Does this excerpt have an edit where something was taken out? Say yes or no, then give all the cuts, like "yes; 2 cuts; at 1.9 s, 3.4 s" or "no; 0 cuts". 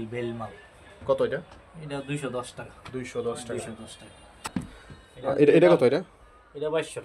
no; 0 cuts